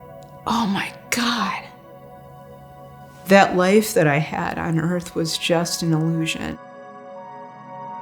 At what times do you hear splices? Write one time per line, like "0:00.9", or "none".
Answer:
0:06.6